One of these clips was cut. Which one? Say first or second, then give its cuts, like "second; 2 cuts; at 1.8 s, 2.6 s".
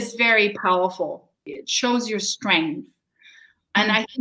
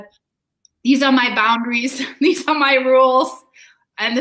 first; 1 cut; at 1.5 s